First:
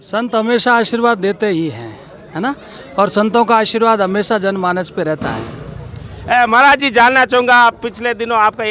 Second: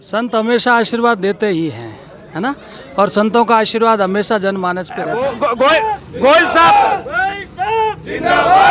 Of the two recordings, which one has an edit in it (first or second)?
second